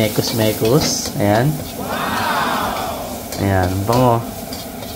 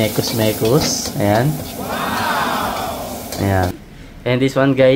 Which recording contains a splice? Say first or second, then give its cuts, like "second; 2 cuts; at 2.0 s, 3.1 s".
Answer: second; 1 cut; at 3.7 s